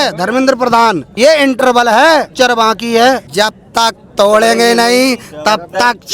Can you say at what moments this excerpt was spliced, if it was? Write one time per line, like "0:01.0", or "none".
0:01.1
0:02.3
0:03.3